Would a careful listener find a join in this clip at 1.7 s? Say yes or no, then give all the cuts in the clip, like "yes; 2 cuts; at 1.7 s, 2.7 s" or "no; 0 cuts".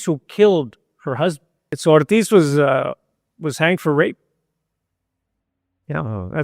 yes; 1 cut; at 1.7 s